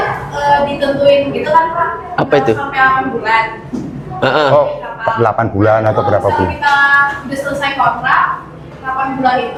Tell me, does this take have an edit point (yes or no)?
no